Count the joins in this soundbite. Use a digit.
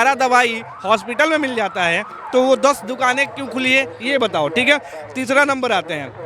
0